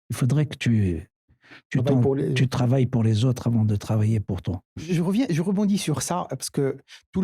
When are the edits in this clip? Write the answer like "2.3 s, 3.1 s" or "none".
4.8 s